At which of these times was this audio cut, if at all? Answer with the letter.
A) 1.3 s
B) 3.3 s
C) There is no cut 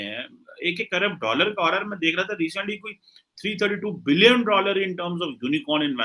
C